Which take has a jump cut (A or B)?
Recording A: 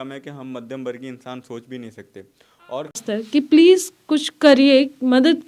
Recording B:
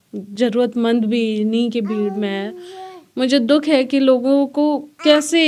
A